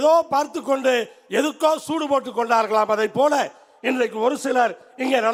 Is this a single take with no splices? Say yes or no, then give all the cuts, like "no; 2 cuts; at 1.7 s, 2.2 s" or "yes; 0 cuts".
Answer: yes; 0 cuts